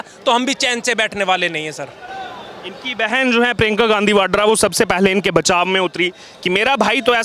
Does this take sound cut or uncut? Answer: uncut